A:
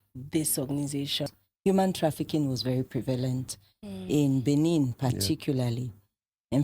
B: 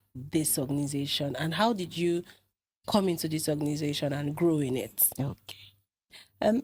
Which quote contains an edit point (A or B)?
A